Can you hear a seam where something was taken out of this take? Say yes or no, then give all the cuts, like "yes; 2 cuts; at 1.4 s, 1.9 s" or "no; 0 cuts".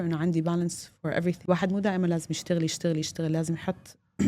yes; 1 cut; at 1.4 s